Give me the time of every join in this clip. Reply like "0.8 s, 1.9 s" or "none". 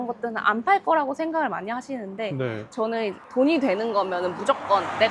none